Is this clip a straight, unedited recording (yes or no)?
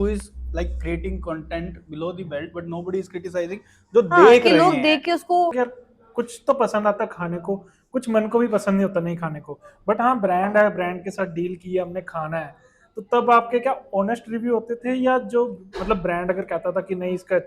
no